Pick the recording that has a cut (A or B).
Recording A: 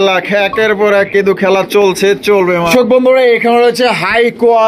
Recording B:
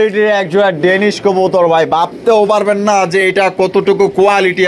A